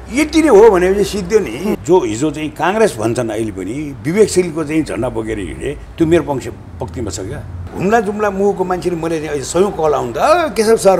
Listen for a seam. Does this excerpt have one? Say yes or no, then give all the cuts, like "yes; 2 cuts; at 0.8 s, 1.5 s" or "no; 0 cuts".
yes; 2 cuts; at 1.7 s, 7.6 s